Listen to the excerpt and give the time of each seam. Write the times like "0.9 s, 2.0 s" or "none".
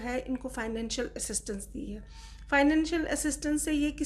none